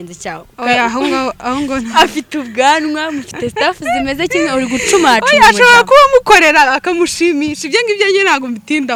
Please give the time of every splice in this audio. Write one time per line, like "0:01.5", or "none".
none